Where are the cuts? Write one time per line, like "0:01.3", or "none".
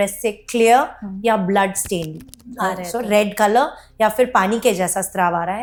none